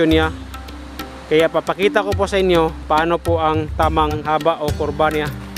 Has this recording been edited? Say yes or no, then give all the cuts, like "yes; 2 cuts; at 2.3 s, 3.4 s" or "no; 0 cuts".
yes; 1 cut; at 4.2 s